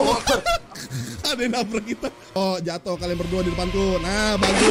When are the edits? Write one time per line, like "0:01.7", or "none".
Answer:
0:02.4